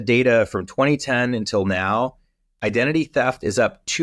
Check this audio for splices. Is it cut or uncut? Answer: uncut